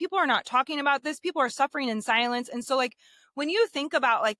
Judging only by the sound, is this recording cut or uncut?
uncut